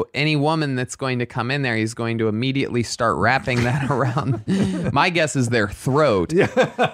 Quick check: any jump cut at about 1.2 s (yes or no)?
no